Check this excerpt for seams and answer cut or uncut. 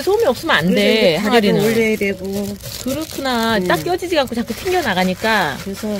uncut